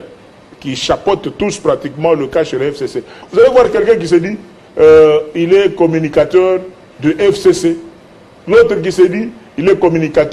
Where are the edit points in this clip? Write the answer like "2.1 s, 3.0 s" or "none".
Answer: 3.1 s